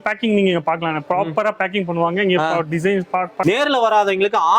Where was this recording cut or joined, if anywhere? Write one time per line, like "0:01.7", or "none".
0:03.3